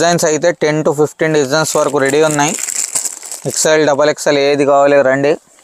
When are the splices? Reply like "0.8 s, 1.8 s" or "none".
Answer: none